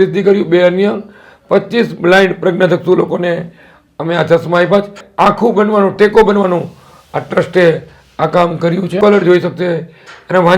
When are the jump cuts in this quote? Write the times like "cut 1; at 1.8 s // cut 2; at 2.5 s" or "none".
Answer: cut 1; at 5.0 s // cut 2; at 9.0 s